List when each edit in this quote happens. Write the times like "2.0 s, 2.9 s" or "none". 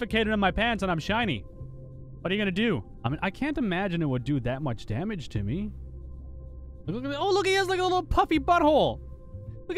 2.9 s

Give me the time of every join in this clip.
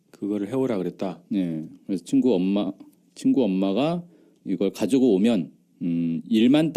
3.7 s

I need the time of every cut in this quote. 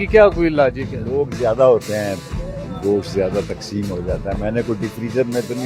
none

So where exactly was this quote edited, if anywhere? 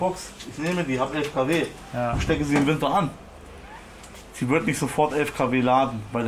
none

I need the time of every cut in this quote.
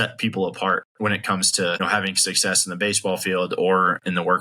0.9 s, 1.8 s

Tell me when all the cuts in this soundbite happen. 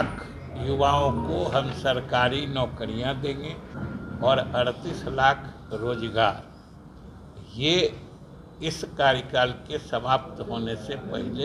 3.7 s

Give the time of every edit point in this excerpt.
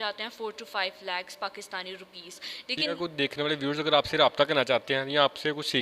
2.9 s

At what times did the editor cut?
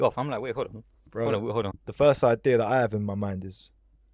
1.7 s

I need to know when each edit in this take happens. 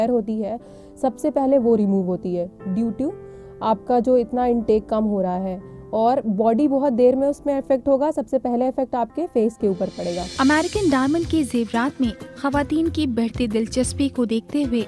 10.3 s

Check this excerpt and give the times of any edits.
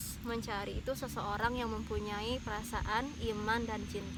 none

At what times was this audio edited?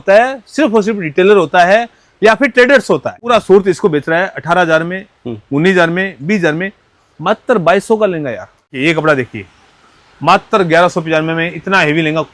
3.3 s, 8.7 s

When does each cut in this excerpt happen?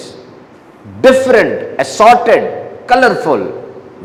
none

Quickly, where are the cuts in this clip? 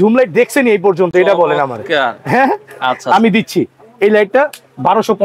none

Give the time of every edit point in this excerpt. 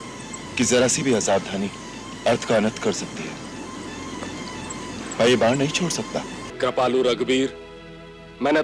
6.4 s

